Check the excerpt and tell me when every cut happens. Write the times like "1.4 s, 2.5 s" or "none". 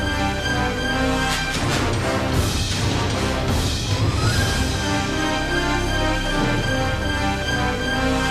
3.7 s